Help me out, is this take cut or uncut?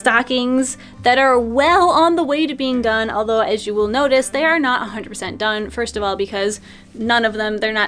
uncut